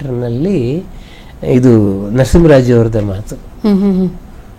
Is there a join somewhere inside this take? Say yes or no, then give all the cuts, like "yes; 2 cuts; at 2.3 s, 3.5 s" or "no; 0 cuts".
no; 0 cuts